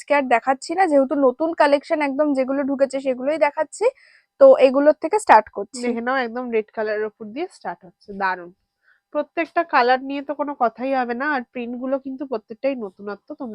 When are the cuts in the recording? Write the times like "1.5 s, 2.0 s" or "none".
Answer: none